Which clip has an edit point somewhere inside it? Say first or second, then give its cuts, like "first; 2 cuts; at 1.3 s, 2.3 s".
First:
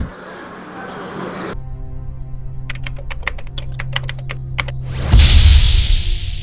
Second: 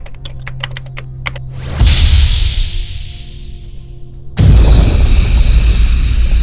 first; 1 cut; at 1.5 s